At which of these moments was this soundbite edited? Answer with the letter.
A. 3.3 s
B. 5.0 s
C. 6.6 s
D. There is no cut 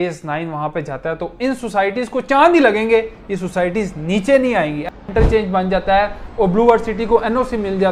B